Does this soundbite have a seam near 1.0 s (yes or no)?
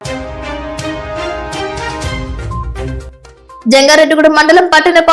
no